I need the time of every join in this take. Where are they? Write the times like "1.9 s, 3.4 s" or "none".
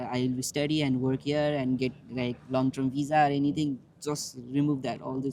none